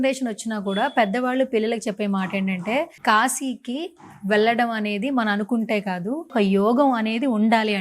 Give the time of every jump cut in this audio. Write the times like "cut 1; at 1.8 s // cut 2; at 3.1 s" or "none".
cut 1; at 2.9 s // cut 2; at 6.3 s